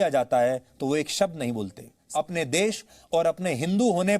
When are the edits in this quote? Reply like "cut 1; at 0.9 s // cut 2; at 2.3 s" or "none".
cut 1; at 2.0 s